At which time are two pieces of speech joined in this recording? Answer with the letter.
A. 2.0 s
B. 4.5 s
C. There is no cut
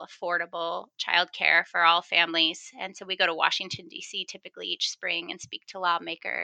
C